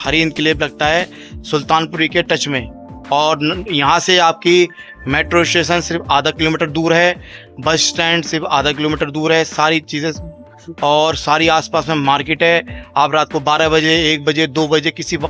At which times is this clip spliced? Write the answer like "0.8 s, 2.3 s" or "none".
none